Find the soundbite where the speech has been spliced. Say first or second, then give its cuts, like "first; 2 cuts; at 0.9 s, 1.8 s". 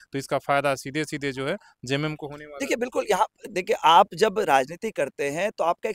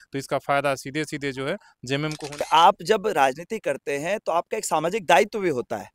second; 1 cut; at 2.5 s